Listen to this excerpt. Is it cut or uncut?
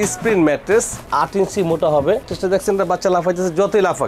cut